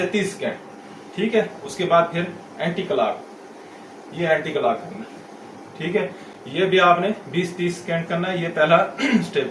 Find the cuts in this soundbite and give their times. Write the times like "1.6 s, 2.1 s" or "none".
none